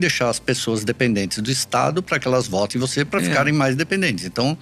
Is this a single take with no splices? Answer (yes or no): yes